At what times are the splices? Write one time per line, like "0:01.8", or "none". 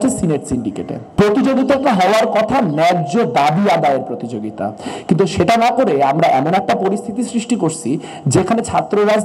0:01.1